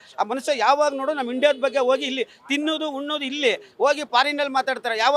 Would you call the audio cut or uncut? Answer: uncut